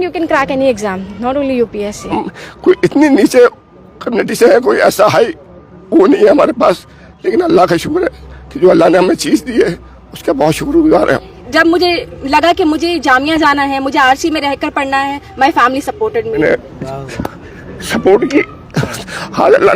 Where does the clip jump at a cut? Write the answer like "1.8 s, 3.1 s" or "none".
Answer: 2.2 s, 11.4 s, 16.4 s